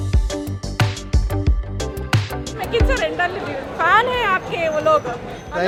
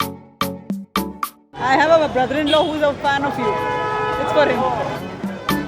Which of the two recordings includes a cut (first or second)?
second